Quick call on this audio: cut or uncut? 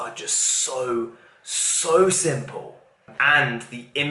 cut